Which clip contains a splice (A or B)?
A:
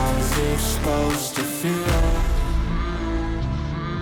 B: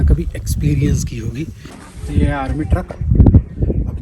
B